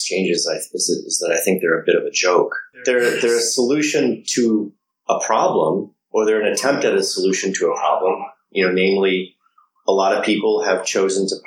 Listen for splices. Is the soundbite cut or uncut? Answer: cut